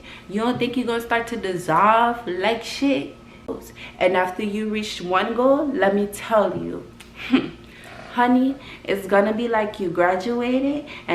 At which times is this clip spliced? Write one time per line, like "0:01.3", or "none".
0:03.5